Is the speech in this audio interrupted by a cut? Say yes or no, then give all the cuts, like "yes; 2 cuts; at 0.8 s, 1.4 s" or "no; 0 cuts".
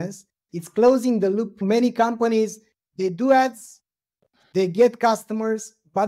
no; 0 cuts